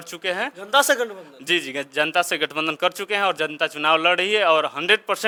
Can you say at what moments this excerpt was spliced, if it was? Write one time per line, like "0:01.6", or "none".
none